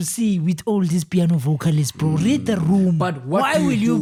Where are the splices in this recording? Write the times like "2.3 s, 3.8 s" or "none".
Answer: none